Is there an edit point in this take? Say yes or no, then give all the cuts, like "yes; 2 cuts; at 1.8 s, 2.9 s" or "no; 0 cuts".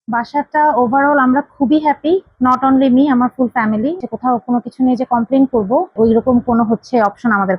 yes; 2 cuts; at 4.0 s, 5.9 s